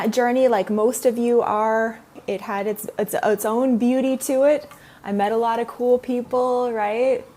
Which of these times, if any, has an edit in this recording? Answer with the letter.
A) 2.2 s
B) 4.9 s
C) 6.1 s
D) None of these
A